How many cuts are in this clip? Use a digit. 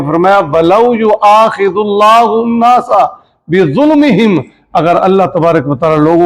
0